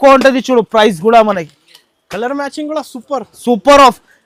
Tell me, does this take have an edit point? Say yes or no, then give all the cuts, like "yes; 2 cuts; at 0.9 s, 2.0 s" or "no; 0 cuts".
no; 0 cuts